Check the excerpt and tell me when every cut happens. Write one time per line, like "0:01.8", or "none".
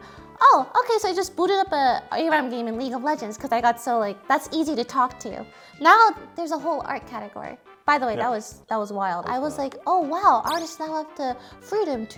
none